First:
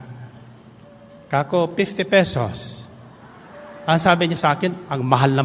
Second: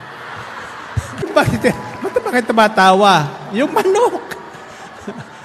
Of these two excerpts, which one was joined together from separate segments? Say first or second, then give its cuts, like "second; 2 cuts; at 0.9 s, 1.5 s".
second; 1 cut; at 1.2 s